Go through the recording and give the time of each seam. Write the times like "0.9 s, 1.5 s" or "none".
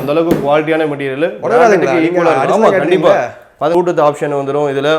3.7 s